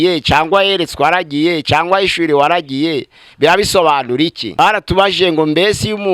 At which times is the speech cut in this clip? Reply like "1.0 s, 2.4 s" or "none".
4.4 s